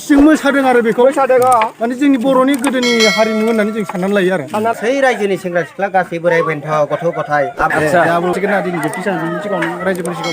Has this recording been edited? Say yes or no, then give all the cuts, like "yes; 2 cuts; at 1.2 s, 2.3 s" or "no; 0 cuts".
yes; 3 cuts; at 4.7 s, 7.7 s, 8.3 s